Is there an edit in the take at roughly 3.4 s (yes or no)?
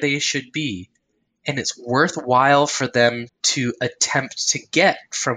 yes